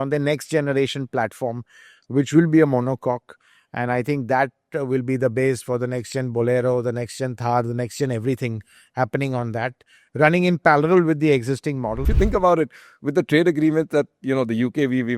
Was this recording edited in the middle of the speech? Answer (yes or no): yes